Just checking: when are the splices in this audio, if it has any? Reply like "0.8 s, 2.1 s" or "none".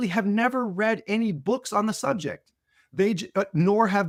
none